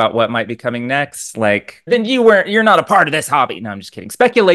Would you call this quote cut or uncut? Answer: cut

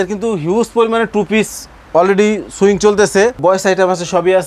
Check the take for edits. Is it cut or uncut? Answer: cut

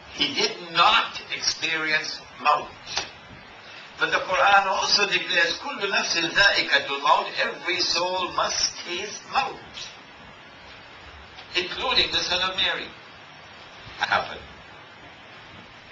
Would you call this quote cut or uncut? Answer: uncut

